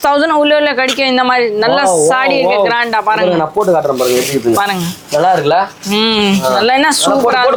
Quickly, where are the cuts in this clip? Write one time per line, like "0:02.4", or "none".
none